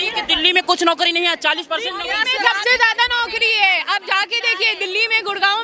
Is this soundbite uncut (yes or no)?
yes